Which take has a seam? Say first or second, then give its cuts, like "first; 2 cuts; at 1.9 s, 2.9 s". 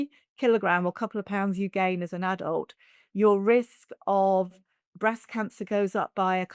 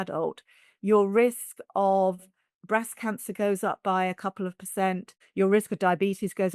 second; 1 cut; at 5.1 s